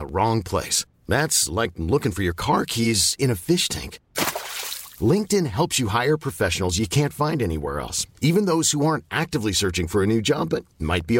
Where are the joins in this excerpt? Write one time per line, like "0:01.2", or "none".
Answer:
none